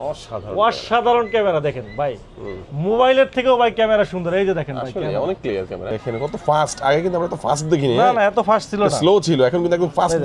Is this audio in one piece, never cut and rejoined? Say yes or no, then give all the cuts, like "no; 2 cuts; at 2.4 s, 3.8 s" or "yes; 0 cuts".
no; 1 cut; at 5.8 s